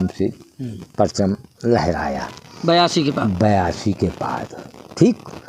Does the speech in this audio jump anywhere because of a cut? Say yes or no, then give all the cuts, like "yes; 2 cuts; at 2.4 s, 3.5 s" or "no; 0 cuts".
no; 0 cuts